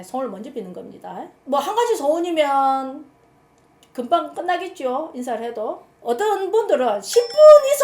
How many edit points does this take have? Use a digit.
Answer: 2